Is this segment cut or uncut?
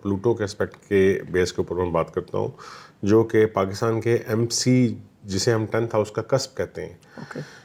uncut